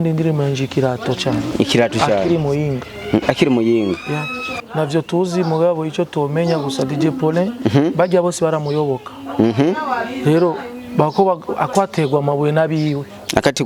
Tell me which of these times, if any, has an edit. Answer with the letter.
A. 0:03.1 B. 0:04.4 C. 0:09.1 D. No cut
B